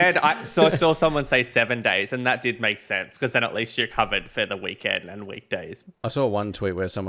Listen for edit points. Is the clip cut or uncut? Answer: cut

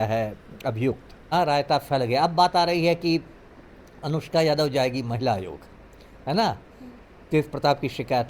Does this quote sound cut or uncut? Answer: cut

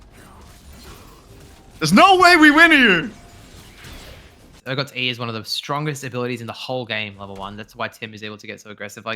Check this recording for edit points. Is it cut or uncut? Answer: cut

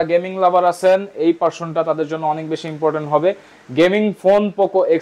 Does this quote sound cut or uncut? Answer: uncut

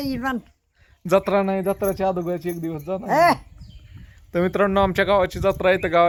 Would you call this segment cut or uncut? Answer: uncut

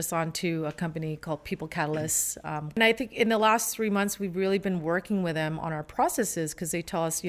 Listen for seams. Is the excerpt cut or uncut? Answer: cut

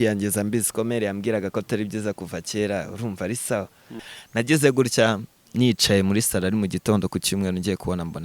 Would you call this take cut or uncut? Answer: cut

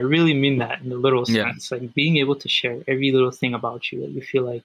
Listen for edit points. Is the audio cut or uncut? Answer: uncut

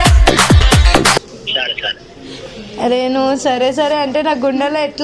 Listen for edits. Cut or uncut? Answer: cut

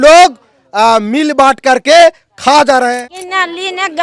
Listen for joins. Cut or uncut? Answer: cut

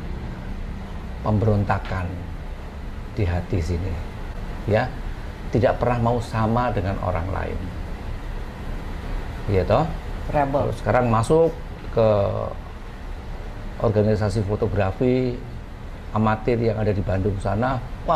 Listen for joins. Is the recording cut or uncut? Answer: uncut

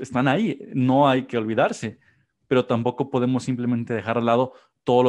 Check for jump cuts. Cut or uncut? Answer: uncut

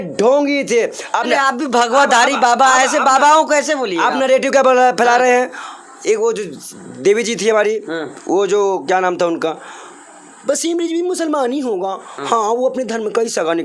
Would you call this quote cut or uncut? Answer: uncut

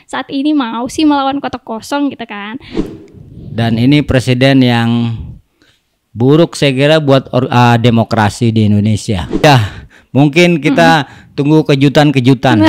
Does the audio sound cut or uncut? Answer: cut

